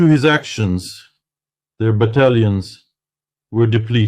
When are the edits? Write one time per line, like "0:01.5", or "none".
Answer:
none